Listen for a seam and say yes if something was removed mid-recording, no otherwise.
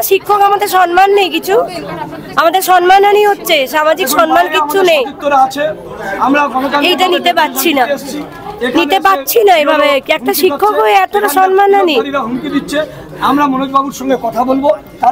no